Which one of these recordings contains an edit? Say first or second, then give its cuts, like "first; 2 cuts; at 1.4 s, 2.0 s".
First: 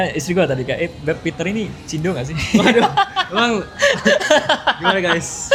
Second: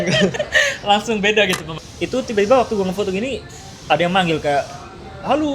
second; 1 cut; at 1.7 s